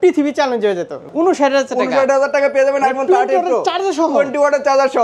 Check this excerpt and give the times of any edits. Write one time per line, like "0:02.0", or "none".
0:01.1